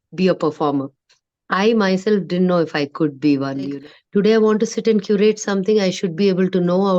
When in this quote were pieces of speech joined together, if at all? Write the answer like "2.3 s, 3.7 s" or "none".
3.8 s